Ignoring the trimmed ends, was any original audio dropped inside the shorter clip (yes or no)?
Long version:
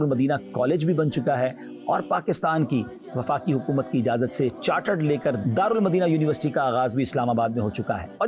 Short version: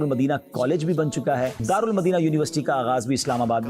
yes